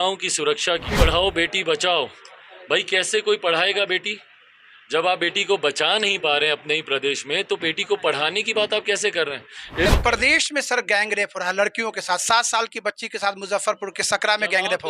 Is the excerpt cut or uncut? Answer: cut